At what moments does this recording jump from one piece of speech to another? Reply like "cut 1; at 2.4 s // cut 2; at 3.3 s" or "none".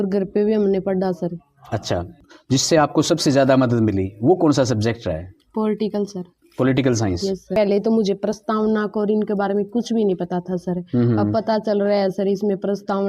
cut 1; at 7.5 s